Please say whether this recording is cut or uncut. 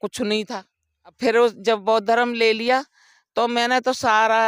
cut